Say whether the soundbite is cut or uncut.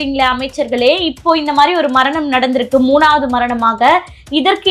uncut